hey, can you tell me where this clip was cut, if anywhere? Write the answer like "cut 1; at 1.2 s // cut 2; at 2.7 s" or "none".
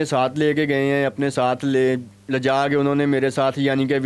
none